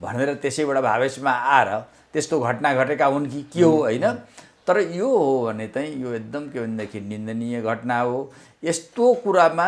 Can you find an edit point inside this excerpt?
no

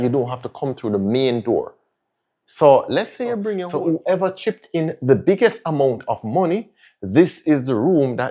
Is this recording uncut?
no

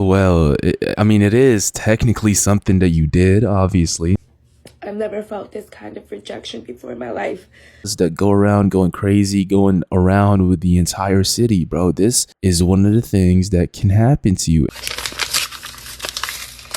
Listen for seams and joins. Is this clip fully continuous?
no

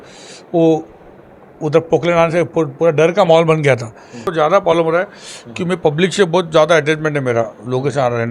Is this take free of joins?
no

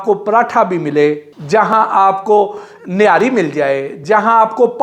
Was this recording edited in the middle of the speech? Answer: yes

